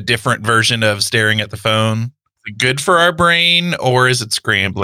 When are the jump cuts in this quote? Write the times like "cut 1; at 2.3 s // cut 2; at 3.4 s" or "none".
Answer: cut 1; at 2.4 s